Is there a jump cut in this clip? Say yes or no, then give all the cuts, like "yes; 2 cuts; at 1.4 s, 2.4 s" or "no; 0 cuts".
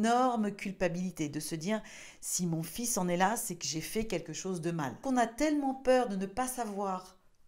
yes; 1 cut; at 5.0 s